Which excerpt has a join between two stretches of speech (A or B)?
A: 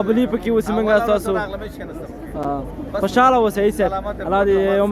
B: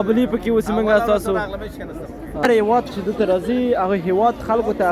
B